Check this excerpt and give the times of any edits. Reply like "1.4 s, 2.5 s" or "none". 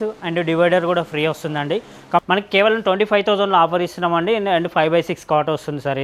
2.2 s